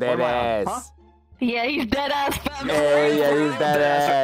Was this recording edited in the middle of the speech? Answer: no; 0 cuts

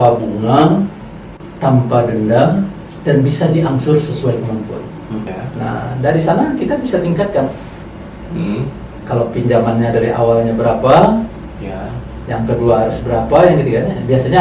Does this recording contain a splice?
yes; 1 cut; at 5.3 s

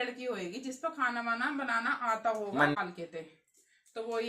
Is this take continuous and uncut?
no; 1 cut; at 2.8 s

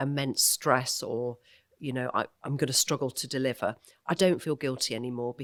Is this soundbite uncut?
yes; 0 cuts

